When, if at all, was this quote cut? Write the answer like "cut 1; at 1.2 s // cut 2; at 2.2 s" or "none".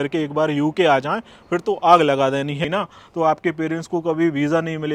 cut 1; at 2.6 s